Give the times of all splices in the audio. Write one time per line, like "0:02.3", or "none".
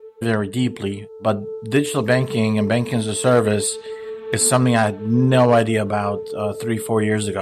0:01.1

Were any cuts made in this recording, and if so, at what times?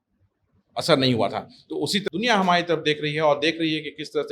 0:02.0

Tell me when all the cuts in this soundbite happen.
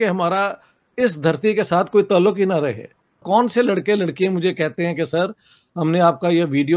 0:03.1

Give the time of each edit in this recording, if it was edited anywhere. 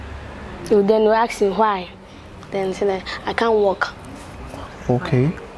none

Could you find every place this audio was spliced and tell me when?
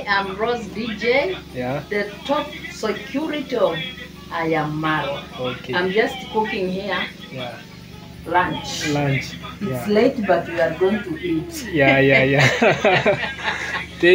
none

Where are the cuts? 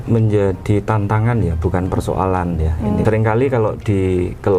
0:03.0

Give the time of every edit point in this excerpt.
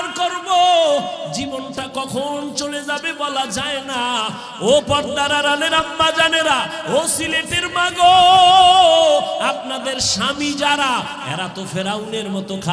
0:04.5

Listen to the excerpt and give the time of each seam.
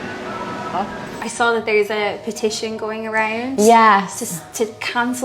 0:01.1

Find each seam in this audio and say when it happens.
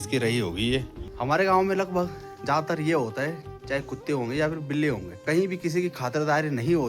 0:01.0
0:05.1

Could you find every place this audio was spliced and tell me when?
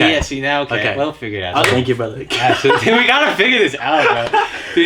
0:01.6

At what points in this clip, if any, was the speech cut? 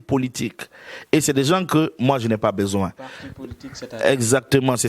none

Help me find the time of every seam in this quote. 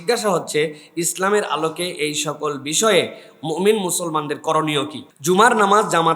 0:05.1

